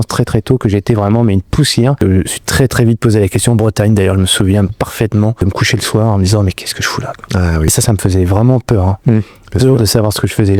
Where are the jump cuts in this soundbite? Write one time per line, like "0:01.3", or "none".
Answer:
0:02.0
0:05.4
0:07.7